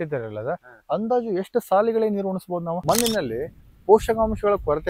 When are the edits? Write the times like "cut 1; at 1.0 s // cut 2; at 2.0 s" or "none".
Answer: cut 1; at 2.8 s

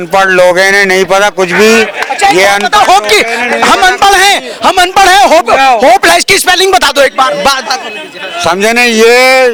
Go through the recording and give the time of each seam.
none

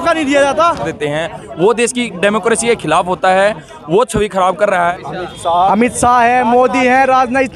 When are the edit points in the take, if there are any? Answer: cut 1; at 0.9 s // cut 2; at 4.9 s

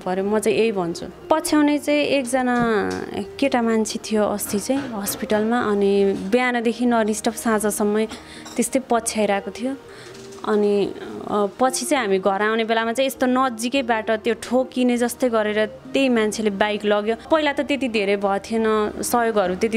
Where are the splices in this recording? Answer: cut 1; at 1.1 s // cut 2; at 17.3 s

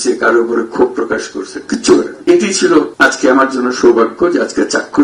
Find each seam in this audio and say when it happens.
cut 1; at 2.1 s // cut 2; at 2.9 s

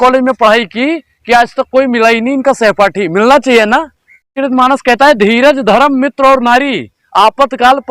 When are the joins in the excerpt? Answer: cut 1; at 4.3 s

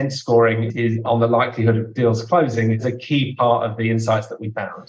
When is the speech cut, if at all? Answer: none

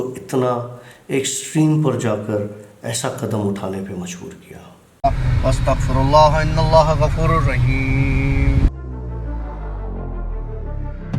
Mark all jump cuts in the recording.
cut 1; at 4.9 s

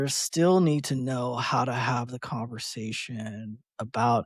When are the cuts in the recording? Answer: none

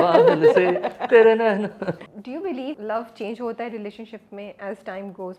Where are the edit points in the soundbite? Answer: cut 1; at 2.4 s

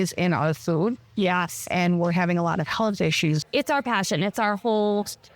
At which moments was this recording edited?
cut 1; at 3.4 s

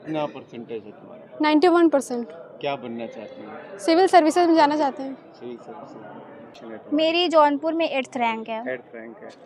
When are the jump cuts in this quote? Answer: cut 1; at 6.6 s

